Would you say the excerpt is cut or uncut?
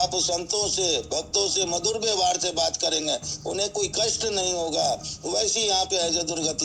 uncut